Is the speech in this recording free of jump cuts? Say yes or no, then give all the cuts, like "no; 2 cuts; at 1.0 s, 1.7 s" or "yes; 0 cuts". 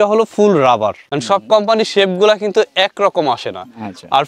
no; 1 cut; at 1.1 s